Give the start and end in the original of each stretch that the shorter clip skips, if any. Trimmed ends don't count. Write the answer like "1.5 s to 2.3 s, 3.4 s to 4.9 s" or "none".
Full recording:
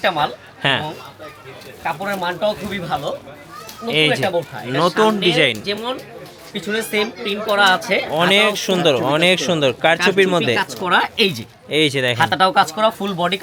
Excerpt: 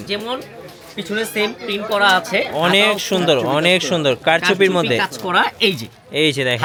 none